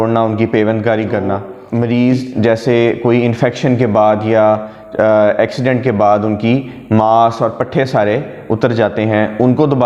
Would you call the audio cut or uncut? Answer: cut